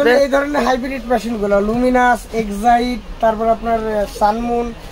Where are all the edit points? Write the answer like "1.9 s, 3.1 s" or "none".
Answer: none